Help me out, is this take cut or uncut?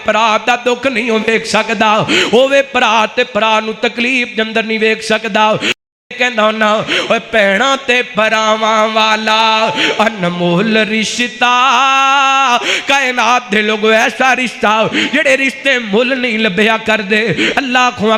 uncut